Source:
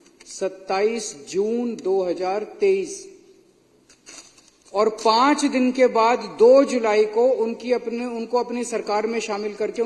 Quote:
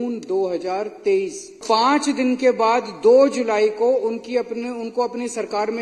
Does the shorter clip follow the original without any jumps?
no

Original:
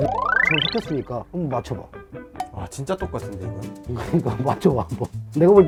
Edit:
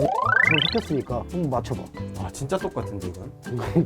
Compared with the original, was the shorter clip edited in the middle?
yes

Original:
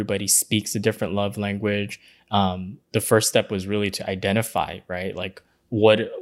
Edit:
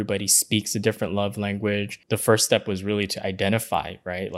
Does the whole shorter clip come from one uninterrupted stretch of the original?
no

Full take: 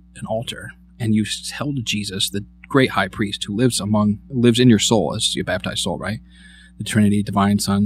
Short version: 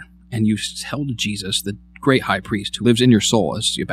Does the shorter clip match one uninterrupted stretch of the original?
no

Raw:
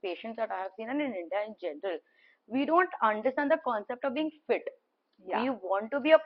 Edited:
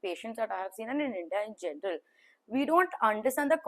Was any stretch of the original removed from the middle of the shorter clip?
no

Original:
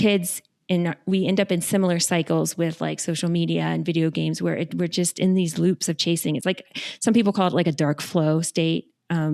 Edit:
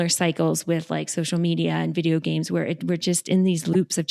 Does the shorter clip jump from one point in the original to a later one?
no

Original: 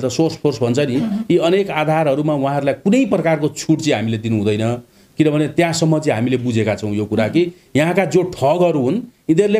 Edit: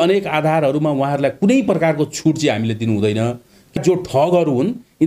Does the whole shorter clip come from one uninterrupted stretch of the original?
no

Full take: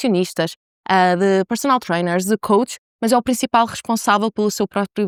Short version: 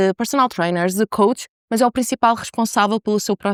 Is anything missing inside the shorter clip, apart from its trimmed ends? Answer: no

